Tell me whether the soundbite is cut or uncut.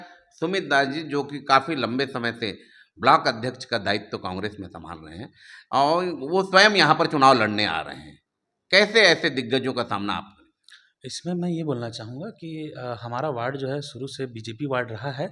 uncut